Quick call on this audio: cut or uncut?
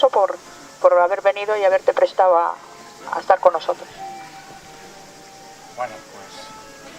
uncut